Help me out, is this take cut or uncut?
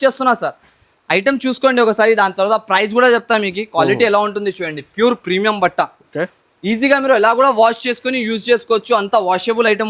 uncut